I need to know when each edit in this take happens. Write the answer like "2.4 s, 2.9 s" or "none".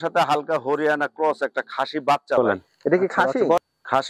2.4 s